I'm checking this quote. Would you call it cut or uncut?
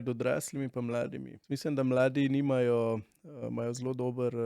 cut